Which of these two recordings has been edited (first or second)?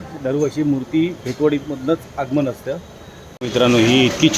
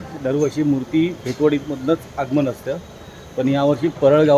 first